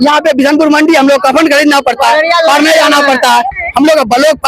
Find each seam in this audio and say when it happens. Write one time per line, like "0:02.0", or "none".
none